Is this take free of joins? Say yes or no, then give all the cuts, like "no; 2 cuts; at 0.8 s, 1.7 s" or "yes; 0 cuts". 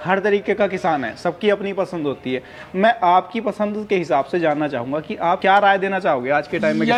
yes; 0 cuts